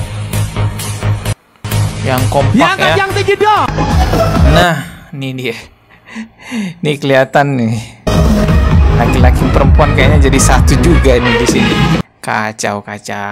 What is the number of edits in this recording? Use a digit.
0